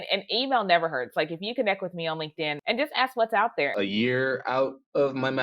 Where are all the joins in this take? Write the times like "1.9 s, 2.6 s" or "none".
2.6 s, 3.7 s